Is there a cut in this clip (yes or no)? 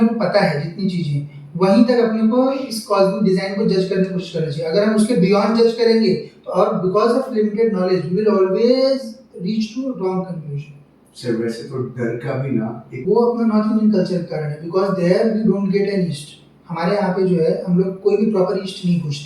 yes